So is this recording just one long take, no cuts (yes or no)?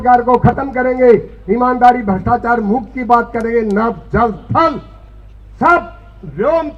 yes